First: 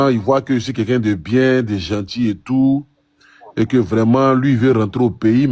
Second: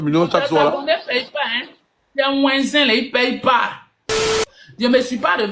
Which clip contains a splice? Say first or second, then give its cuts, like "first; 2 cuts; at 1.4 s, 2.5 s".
second; 1 cut; at 4.4 s